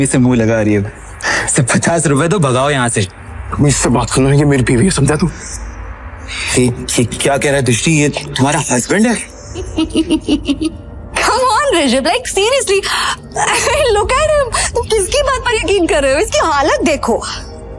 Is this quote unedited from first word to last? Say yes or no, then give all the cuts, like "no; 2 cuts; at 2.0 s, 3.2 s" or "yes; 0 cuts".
no; 1 cut; at 9.7 s